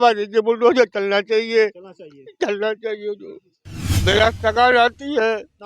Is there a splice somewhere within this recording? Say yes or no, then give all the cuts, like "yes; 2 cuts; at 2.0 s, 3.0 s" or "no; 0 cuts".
yes; 1 cut; at 3.9 s